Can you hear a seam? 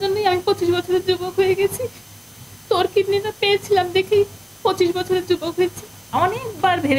yes; 1 cut; at 6.1 s

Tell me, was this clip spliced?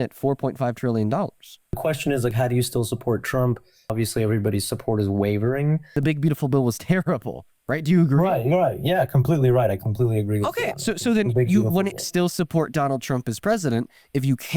yes; 3 cuts; at 1.7 s, 3.9 s, 6.0 s

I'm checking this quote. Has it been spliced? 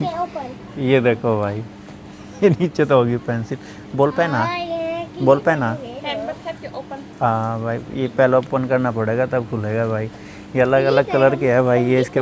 no; 0 cuts

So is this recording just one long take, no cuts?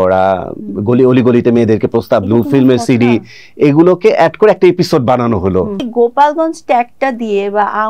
no; 1 cut; at 5.8 s

